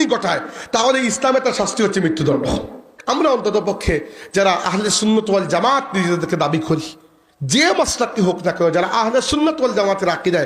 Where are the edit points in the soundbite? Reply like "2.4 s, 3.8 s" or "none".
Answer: 2.9 s